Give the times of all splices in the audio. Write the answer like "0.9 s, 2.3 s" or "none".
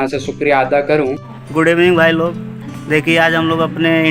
1.3 s